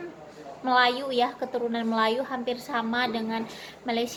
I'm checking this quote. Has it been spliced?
no; 0 cuts

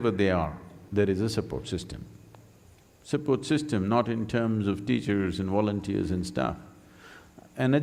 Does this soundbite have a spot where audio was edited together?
no; 0 cuts

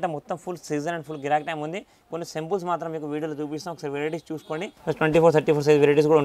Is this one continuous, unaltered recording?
no; 1 cut; at 4.8 s

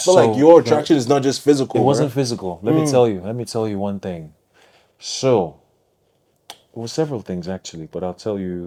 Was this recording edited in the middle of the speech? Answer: no; 0 cuts

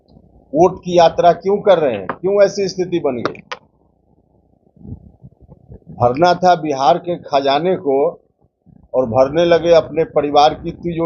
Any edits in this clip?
no; 0 cuts

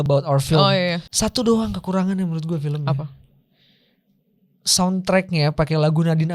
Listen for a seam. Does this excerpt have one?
yes; 1 cut; at 1.1 s

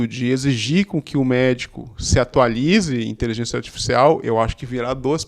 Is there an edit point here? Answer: no; 0 cuts

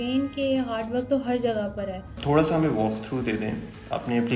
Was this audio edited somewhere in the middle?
yes; 1 cut; at 2.1 s

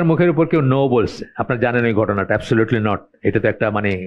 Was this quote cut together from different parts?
no; 0 cuts

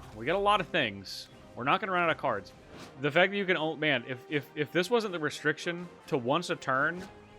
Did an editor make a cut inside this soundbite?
yes; 1 cut; at 5.9 s

